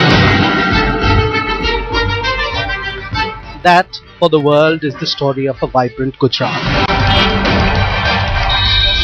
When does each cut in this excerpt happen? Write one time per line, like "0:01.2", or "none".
none